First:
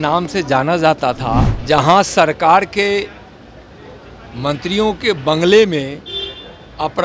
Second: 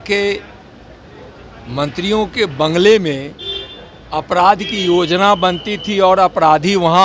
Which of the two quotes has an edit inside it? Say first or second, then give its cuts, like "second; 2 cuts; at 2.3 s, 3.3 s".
first; 1 cut; at 1.5 s